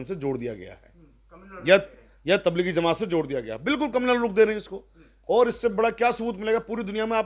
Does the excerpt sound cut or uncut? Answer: uncut